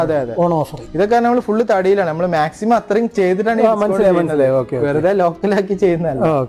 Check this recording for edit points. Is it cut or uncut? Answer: uncut